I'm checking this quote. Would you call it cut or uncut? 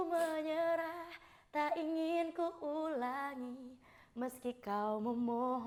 uncut